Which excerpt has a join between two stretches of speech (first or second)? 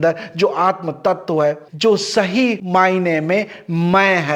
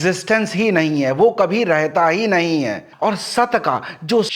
second